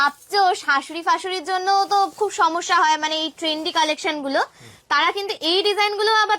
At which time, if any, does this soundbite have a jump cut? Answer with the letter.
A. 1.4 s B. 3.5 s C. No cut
C